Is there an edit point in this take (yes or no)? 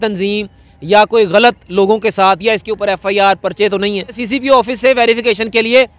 yes